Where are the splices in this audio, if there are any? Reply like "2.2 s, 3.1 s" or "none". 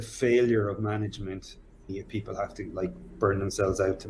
1.9 s